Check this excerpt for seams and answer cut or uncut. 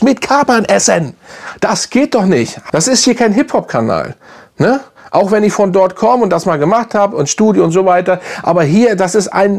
cut